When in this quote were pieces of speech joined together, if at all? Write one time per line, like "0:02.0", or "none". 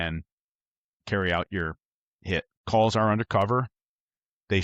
0:02.6